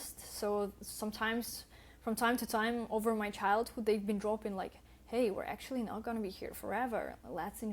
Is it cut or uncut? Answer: uncut